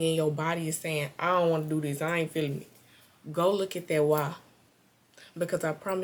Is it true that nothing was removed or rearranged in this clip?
yes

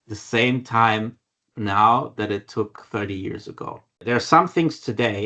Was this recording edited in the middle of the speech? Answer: yes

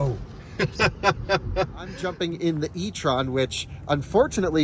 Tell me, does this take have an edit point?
yes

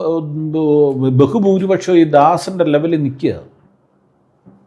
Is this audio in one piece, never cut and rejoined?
yes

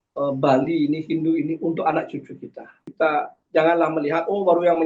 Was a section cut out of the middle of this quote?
yes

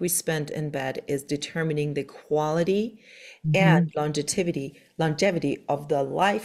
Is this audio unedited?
yes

